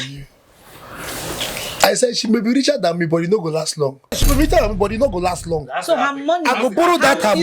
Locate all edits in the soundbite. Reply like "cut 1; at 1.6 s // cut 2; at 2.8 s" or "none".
cut 1; at 4.2 s